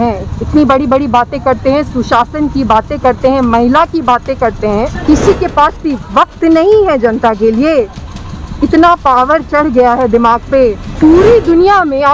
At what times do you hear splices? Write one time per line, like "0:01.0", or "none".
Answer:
0:05.0
0:10.9